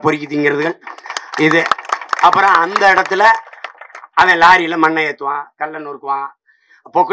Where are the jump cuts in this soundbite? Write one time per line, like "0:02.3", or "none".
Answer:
none